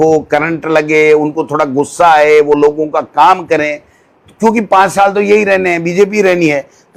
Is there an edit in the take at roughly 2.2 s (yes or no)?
no